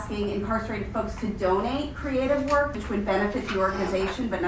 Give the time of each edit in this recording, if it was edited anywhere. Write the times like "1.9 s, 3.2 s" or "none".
2.8 s